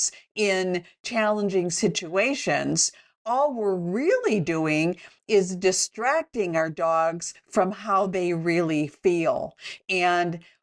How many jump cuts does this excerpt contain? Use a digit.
0